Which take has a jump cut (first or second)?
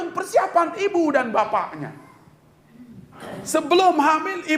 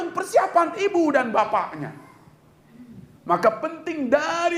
first